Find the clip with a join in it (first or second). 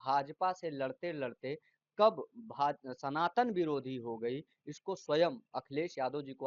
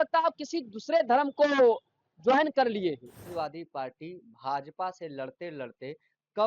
second